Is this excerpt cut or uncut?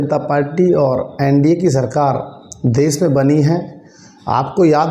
uncut